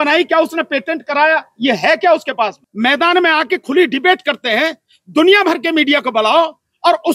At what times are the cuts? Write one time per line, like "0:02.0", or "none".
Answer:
0:02.6